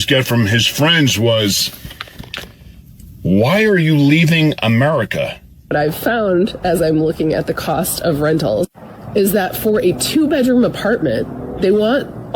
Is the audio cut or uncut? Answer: cut